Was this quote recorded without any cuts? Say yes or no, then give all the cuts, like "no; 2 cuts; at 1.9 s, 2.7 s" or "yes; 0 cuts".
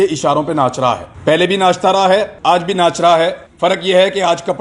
no; 3 cuts; at 1.1 s, 2.3 s, 3.4 s